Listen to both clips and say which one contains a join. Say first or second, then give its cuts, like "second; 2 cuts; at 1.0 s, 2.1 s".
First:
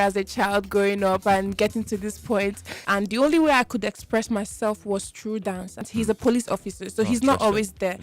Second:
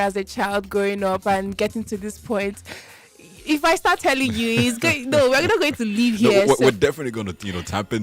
first; 2 cuts; at 2.7 s, 5.8 s